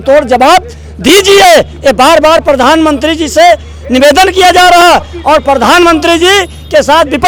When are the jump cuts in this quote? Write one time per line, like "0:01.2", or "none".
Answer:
none